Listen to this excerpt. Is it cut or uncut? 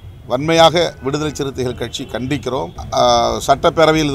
cut